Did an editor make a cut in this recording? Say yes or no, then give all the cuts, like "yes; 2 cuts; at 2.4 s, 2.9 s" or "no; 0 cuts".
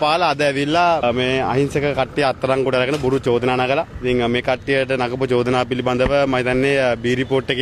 no; 0 cuts